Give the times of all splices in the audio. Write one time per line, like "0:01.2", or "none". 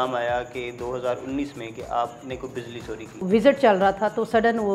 0:03.2